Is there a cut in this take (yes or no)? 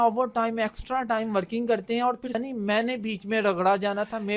yes